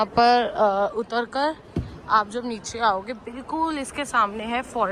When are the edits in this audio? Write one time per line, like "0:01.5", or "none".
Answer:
none